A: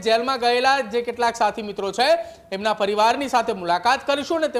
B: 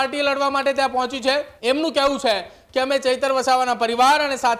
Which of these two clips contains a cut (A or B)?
B